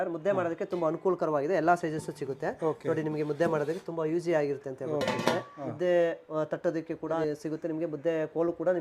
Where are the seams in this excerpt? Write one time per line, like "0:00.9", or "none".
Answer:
none